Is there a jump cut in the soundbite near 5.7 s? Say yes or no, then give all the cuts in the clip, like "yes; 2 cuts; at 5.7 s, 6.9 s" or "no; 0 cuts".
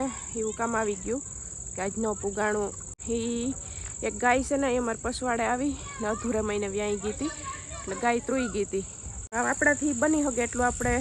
no; 2 cuts; at 2.9 s, 9.3 s